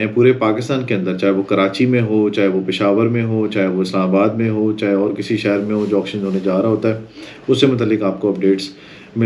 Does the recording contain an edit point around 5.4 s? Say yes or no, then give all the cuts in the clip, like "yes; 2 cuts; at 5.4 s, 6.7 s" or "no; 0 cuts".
no; 0 cuts